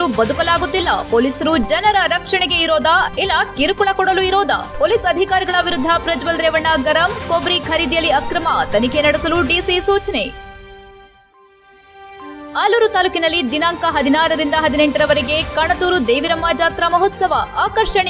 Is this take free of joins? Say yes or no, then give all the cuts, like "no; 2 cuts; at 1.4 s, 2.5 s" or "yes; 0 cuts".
yes; 0 cuts